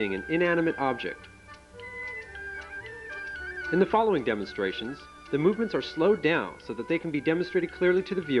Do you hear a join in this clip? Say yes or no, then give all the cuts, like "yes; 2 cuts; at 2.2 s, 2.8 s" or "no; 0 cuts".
yes; 1 cut; at 3.4 s